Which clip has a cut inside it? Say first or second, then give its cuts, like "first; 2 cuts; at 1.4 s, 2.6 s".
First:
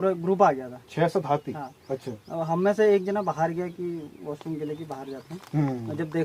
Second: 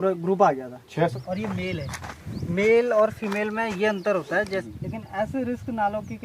second; 2 cuts; at 1.1 s, 4.5 s